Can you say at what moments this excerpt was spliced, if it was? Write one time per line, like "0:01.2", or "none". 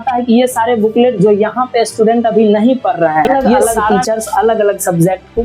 0:03.3